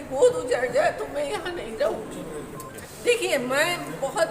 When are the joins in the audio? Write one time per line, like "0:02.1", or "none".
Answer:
0:02.7